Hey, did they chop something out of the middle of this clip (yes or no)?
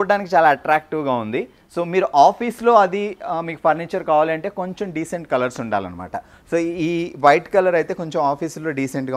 no